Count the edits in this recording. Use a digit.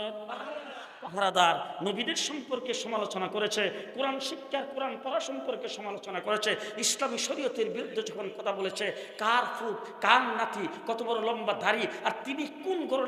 0